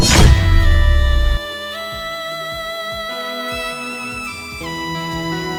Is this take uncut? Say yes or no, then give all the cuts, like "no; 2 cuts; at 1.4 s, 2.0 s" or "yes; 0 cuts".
yes; 0 cuts